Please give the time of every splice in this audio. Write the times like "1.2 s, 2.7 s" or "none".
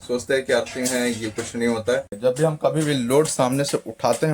2.2 s